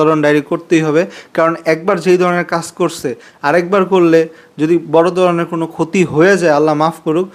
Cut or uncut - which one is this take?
uncut